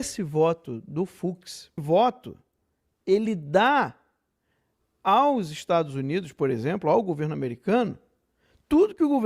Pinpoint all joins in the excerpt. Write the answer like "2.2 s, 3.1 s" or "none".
1.8 s